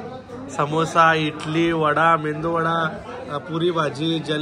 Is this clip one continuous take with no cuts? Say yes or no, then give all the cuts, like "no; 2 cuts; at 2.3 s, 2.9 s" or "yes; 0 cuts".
yes; 0 cuts